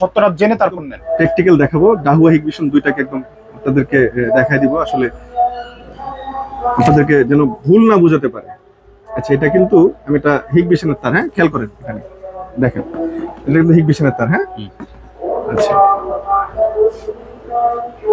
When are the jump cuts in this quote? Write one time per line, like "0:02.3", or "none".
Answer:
0:01.0